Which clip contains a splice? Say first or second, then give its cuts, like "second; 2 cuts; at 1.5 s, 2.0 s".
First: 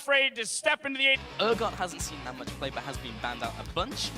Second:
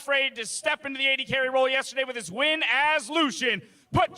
second; 1 cut; at 1.2 s